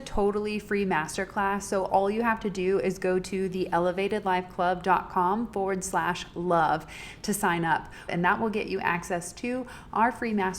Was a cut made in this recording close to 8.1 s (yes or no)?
yes